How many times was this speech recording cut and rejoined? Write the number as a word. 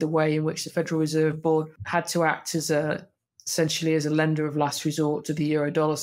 one